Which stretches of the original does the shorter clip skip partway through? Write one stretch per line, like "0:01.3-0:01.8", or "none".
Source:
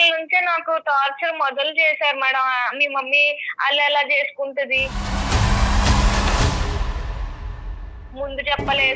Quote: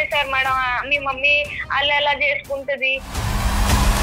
0:05.0-0:05.3